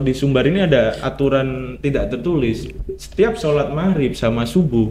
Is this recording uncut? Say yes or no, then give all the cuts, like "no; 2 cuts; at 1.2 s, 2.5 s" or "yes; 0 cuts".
yes; 0 cuts